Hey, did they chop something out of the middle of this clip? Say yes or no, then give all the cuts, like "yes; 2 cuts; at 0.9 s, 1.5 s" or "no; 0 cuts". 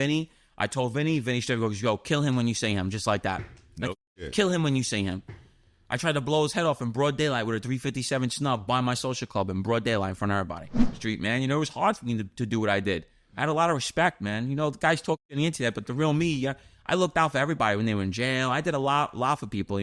yes; 1 cut; at 11.0 s